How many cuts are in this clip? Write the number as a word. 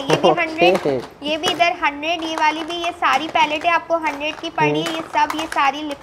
zero